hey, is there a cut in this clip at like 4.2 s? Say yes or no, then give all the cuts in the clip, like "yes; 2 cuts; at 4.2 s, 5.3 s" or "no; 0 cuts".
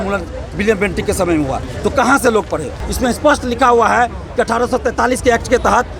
no; 1 cut; at 2.8 s